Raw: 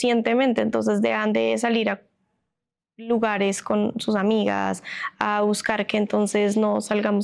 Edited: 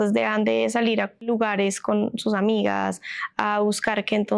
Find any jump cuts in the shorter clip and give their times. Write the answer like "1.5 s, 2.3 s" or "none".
1.2 s